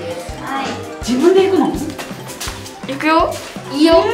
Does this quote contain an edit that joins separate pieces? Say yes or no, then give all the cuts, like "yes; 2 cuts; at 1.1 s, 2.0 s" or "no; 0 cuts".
yes; 1 cut; at 0.9 s